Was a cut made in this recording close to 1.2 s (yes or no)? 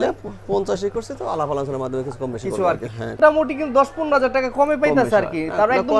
no